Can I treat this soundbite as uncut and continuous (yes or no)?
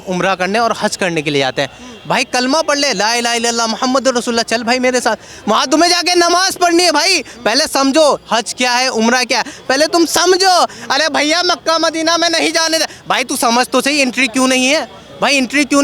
yes